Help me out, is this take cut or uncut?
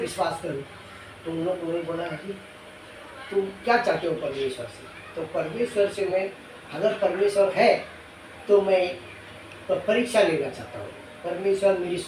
uncut